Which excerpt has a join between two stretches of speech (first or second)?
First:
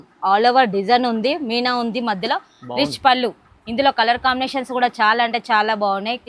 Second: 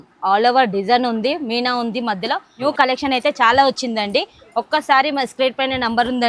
second